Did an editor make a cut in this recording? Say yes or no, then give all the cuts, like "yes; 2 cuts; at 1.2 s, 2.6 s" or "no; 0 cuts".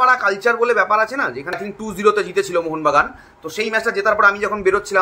yes; 1 cut; at 1.6 s